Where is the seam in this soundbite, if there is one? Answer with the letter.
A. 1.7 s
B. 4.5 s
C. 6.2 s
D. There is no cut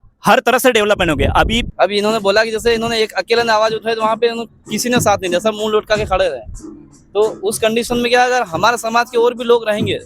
A